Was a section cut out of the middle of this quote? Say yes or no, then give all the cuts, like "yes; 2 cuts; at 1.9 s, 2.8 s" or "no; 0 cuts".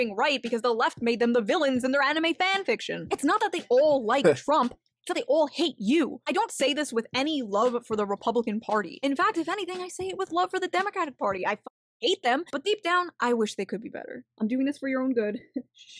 yes; 1 cut; at 6.3 s